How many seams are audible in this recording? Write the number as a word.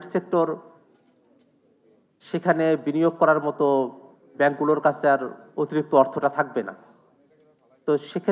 zero